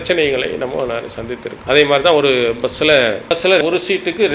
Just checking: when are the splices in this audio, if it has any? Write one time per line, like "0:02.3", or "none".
0:01.5
0:03.3